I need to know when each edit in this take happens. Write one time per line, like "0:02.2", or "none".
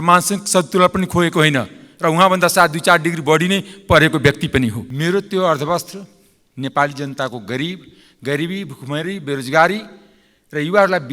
0:04.9